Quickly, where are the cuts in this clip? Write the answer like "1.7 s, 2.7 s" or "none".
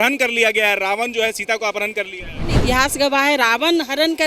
2.6 s